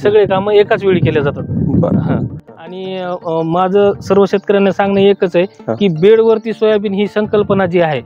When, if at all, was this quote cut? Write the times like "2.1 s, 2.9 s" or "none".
2.3 s